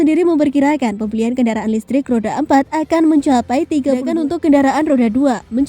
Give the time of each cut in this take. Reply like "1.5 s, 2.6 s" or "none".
4.0 s